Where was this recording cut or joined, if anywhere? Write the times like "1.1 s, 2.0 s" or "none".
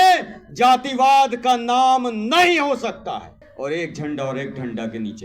3.4 s

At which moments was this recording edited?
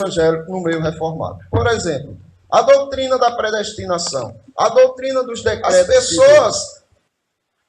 5.9 s

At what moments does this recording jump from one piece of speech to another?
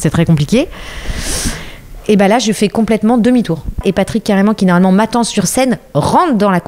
3.8 s

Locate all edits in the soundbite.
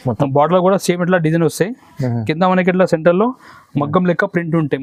none

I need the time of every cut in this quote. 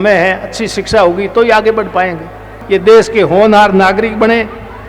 2.5 s

